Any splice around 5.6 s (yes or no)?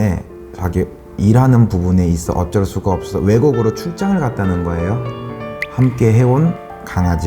yes